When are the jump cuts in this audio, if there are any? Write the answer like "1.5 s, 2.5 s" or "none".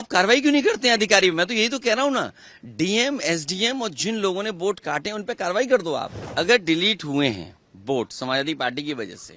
6.2 s